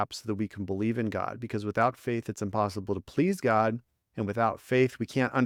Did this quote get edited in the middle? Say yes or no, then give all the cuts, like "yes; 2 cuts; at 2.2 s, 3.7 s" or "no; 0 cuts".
no; 0 cuts